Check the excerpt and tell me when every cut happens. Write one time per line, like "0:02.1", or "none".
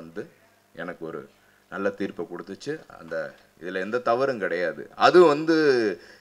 0:03.4

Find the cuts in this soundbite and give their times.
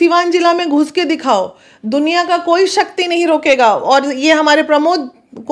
none

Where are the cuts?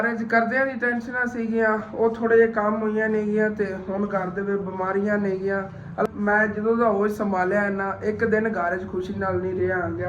0:06.0

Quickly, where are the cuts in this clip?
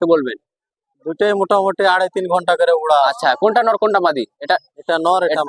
none

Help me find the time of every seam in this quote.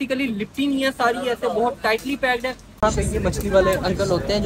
0:02.8

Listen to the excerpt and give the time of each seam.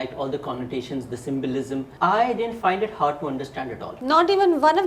0:01.9
0:03.9

